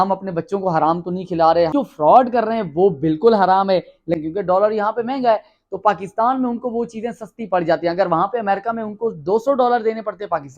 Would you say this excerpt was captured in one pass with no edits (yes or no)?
no